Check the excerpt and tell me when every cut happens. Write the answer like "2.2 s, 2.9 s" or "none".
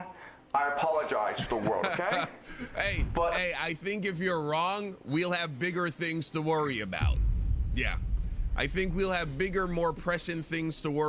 none